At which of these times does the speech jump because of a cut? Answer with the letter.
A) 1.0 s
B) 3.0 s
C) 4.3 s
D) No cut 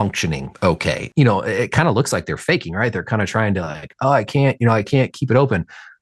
A